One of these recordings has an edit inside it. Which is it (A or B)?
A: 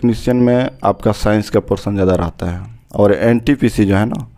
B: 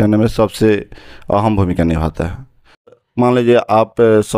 B